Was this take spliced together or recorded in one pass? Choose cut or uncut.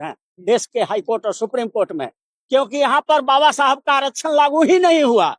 uncut